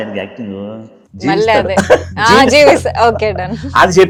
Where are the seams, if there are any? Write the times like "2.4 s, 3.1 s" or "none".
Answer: none